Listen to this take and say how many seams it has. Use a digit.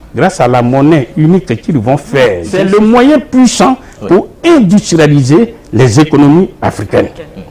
1